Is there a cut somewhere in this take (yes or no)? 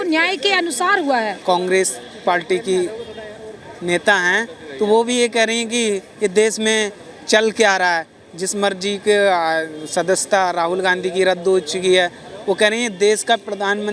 yes